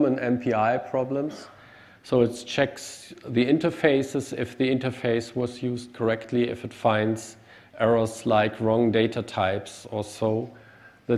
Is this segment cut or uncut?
uncut